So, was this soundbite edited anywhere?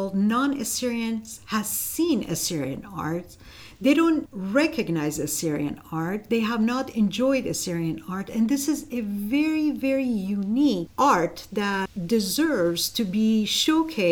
yes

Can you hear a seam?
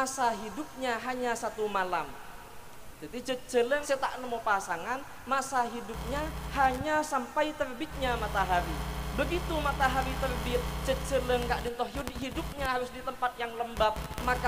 yes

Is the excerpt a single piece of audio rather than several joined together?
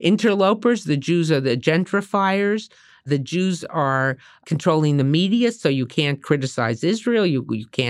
no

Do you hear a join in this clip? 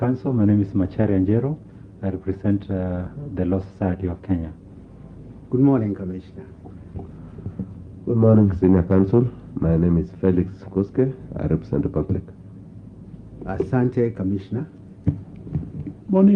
no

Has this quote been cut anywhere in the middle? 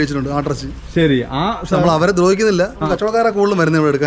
yes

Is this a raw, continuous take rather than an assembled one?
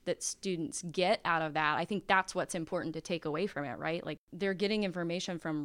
no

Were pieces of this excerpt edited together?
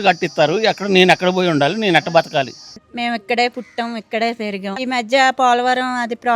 yes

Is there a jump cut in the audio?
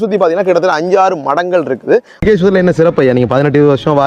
yes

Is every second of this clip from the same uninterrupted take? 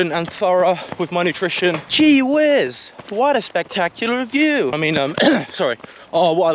no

